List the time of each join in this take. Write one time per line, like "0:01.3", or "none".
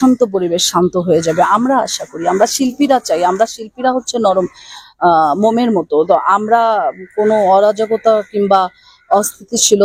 none